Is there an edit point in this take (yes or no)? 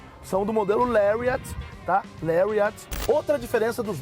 yes